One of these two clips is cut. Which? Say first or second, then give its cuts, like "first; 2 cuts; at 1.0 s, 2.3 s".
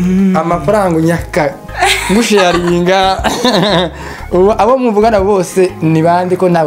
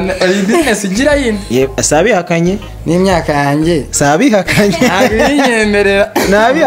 second; 1 cut; at 1.4 s